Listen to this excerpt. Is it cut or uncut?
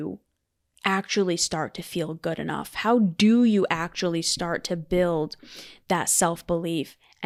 uncut